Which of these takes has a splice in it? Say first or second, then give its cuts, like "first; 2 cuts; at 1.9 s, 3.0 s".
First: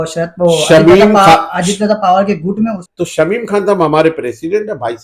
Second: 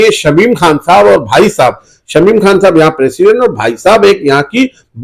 first; 1 cut; at 2.8 s